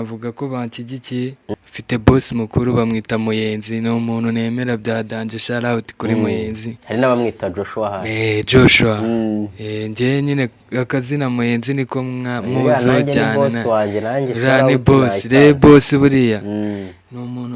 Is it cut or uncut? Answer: cut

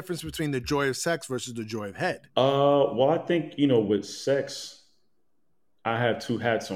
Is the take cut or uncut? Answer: cut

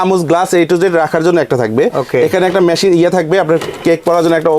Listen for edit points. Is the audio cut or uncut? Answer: uncut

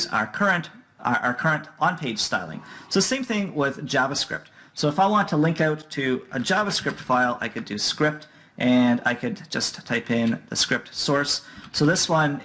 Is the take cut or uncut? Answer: cut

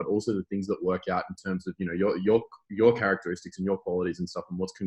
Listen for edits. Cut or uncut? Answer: uncut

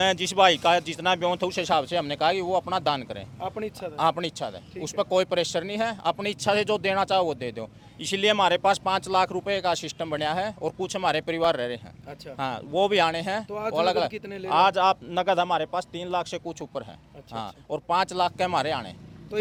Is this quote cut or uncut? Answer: uncut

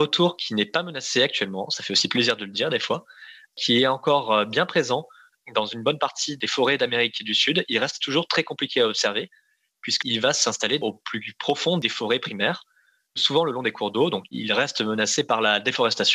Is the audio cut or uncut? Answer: uncut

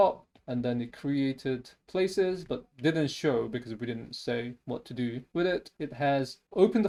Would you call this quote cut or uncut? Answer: uncut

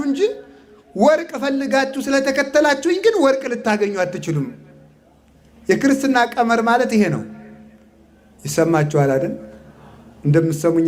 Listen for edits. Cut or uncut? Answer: uncut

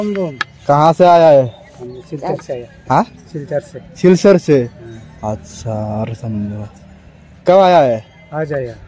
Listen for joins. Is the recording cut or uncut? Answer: uncut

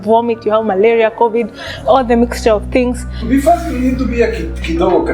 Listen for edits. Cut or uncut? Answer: cut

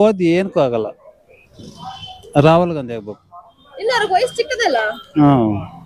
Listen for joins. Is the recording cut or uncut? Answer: uncut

